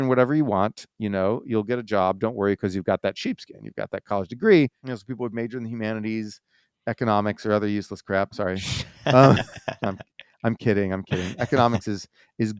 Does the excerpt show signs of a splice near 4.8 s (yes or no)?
yes